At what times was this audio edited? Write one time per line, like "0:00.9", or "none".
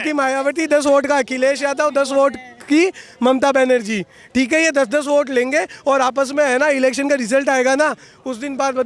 none